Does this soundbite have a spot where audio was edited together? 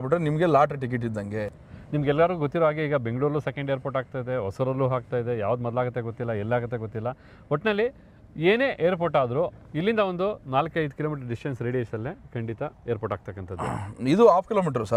no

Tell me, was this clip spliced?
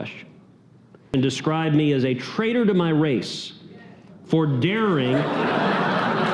yes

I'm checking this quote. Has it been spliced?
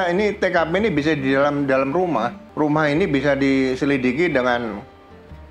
yes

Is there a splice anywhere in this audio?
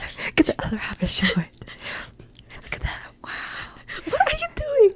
no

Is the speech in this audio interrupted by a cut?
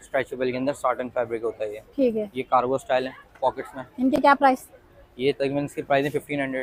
no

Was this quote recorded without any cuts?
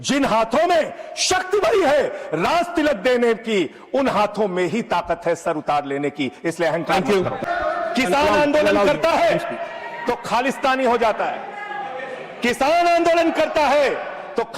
no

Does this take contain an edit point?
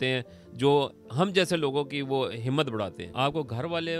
yes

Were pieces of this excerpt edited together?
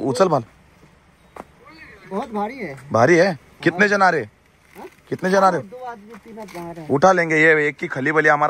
no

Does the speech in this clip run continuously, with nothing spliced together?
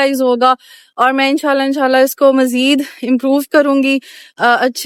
yes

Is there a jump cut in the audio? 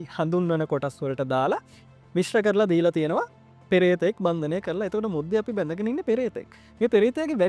no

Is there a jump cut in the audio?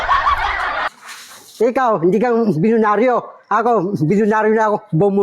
yes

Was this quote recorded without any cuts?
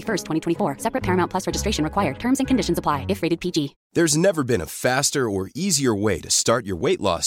no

